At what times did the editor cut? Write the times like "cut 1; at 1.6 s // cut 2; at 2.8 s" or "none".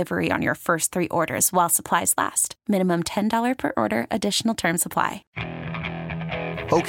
cut 1; at 5.3 s